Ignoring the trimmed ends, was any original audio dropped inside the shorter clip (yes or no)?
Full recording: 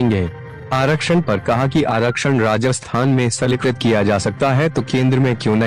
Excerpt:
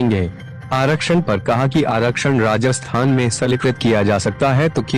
no